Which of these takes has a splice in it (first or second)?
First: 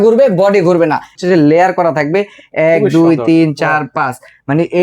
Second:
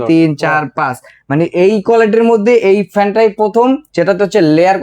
first